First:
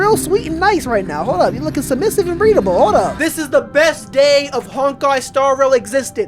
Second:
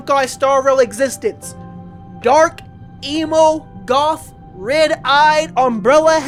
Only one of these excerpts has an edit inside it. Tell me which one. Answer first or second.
first